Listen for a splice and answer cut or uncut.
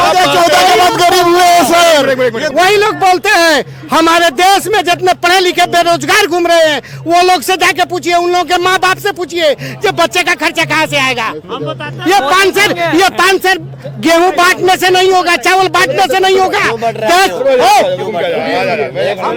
uncut